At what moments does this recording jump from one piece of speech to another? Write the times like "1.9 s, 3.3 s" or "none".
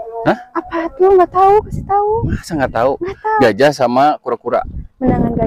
3.4 s